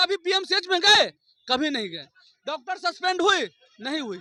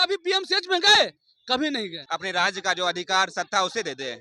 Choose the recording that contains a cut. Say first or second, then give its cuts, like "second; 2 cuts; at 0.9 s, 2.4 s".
second; 1 cut; at 2.0 s